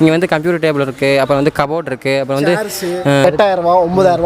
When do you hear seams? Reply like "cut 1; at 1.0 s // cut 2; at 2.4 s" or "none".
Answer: cut 1; at 3.2 s